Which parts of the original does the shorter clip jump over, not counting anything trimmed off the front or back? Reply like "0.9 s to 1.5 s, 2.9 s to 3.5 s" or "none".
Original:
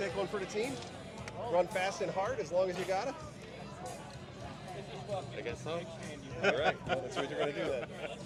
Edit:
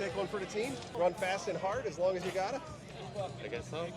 0.9 s to 1.4 s, 3.5 s to 4.9 s

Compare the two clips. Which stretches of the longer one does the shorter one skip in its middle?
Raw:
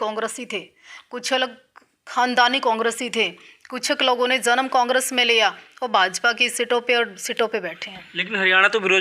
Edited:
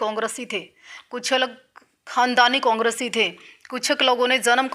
none

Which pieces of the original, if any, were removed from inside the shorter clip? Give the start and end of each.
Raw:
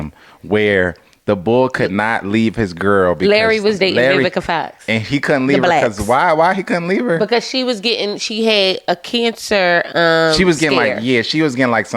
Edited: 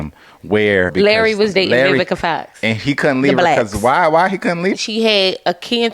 0.9 s to 3.2 s, 7.0 s to 8.2 s

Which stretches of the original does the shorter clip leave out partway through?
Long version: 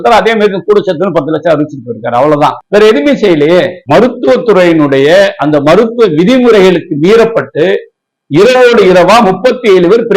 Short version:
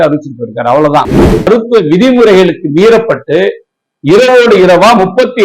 2.7 s to 5.5 s

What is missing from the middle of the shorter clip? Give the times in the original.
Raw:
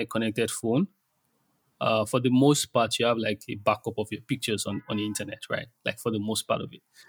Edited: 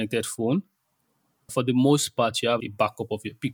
1.8 s to 2.1 s, 3.2 s to 3.5 s

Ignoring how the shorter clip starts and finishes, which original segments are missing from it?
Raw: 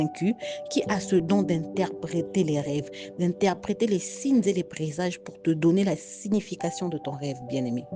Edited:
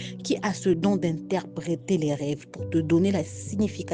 3.0 s to 5.3 s

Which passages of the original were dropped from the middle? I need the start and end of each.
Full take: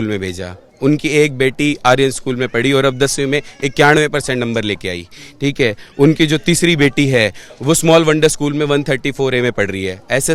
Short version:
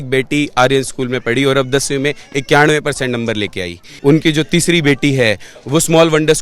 5.2 s to 5.8 s

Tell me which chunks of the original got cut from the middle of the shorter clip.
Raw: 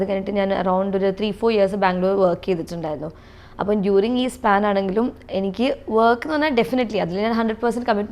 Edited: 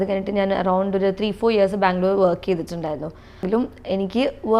3.4 s to 4.9 s

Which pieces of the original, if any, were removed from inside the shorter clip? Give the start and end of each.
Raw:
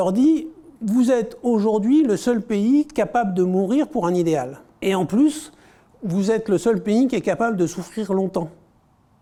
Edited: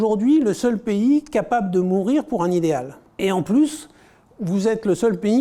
none

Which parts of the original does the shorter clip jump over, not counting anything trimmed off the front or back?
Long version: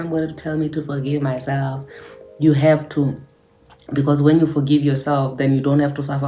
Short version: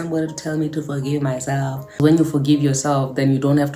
2.0 s to 4.2 s

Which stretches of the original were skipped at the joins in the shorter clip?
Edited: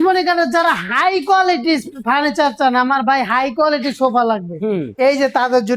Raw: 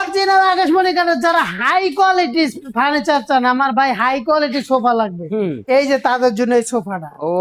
none

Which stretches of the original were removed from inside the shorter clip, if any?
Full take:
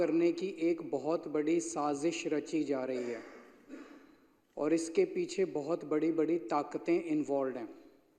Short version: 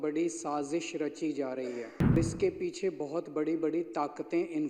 3.5 s to 4.7 s

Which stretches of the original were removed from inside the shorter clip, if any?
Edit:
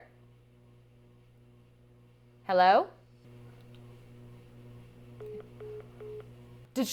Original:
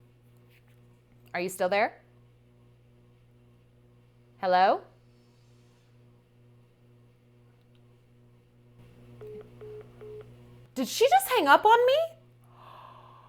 5.2 s to 7.2 s

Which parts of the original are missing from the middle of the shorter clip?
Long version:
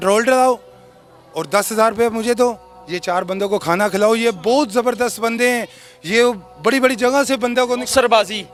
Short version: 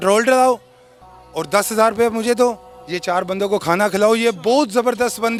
none

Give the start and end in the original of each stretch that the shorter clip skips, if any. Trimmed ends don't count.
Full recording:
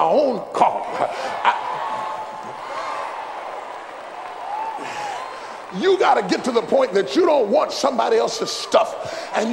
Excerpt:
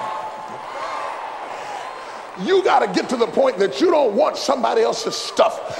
3.6 s to 5.0 s

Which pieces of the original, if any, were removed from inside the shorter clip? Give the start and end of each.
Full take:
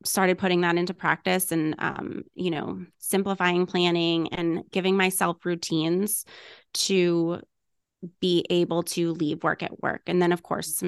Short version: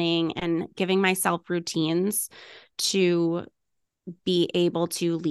none

